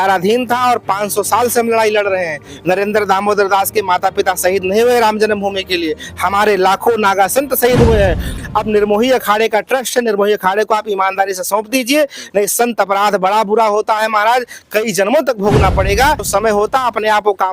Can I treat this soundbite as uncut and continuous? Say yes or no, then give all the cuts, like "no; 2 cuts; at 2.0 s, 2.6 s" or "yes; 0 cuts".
no; 2 cuts; at 8.3 s, 16.3 s